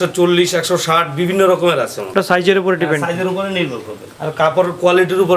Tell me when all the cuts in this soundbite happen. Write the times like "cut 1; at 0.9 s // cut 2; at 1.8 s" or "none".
none

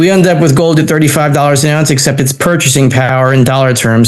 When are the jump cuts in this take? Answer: none

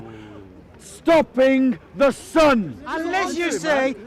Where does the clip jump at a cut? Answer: cut 1; at 2.9 s

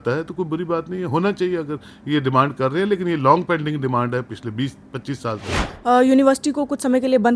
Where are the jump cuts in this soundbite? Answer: cut 1; at 5.7 s

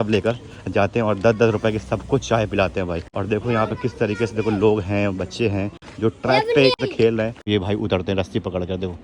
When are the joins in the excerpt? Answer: cut 1; at 3.1 s // cut 2; at 7.5 s

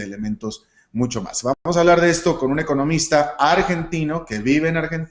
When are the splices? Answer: cut 1; at 3.9 s

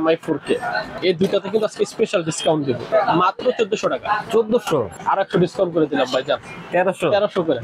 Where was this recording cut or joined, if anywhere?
cut 1; at 0.9 s // cut 2; at 2.9 s // cut 3; at 5.0 s

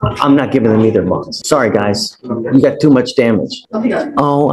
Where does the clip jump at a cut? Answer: cut 1; at 1.3 s // cut 2; at 3.6 s

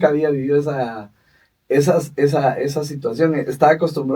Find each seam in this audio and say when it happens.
none

